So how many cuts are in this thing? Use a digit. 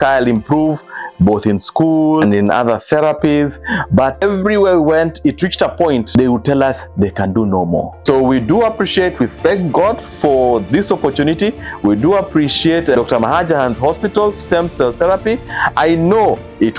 1